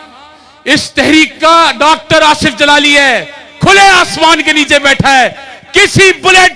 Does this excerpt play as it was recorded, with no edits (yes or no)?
yes